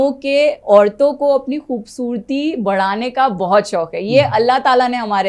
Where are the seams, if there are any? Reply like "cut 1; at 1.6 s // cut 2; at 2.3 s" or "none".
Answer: none